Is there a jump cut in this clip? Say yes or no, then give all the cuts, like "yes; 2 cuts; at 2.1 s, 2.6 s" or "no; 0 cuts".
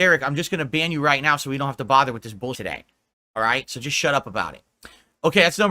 yes; 1 cut; at 2.6 s